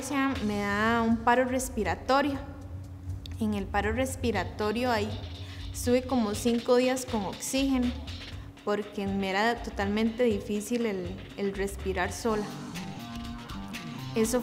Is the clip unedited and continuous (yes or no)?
yes